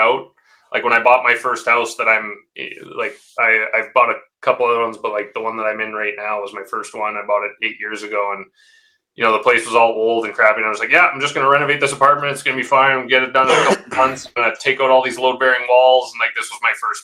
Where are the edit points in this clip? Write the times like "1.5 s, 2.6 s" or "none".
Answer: none